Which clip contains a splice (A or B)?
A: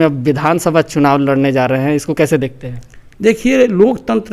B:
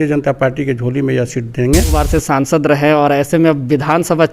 B